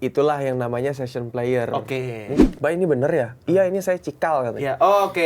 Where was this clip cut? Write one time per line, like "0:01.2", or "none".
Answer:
0:02.4